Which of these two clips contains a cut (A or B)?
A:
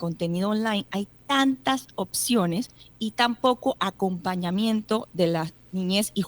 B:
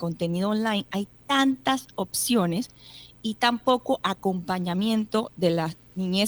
A